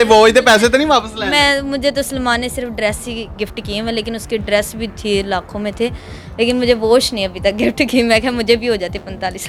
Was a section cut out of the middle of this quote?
no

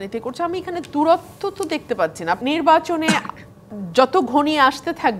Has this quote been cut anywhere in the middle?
yes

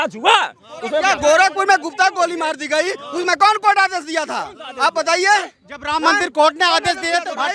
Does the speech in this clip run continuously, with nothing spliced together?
no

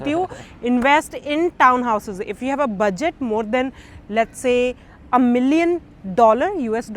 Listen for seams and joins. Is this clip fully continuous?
yes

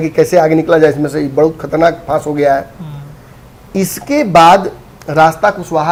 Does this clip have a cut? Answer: no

